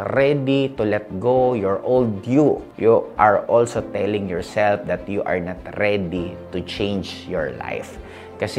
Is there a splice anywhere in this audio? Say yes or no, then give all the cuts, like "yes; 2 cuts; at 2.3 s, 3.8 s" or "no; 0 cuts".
yes; 1 cut; at 2.7 s